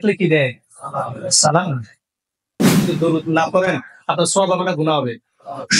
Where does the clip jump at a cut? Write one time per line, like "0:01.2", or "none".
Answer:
0:02.8

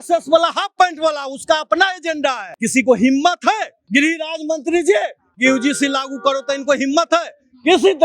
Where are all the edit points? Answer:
0:02.5
0:03.7

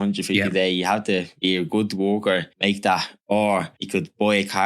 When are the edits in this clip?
0:01.3
0:02.5
0:03.8

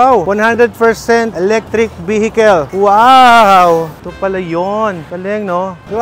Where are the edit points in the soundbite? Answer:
none

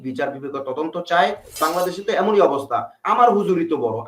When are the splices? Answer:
0:01.6
0:03.0

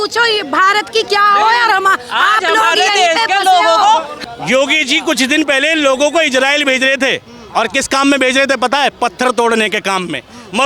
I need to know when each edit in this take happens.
0:04.1

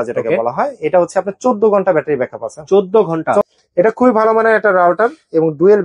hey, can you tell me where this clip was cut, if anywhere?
0:03.5

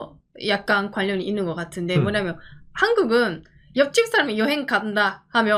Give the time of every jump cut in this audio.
none

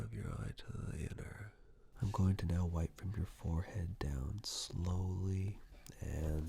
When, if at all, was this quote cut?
0:01.8

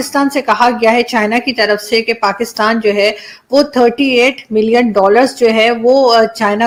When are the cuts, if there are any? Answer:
none

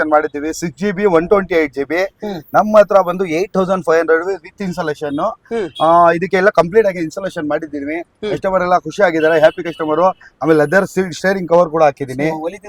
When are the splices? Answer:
none

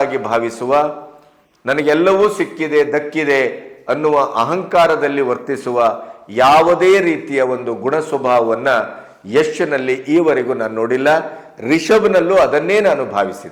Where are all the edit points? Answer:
none

